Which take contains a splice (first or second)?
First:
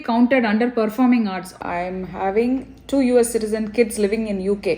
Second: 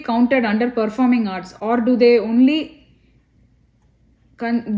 first